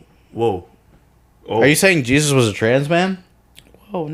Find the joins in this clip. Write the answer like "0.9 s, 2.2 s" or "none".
none